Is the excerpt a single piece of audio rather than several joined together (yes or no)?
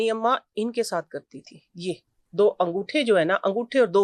yes